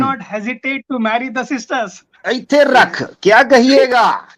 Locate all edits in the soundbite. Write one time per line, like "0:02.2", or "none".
0:02.1